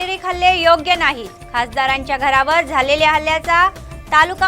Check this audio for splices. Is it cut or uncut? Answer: uncut